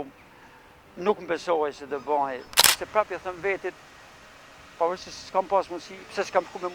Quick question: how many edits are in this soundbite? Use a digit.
1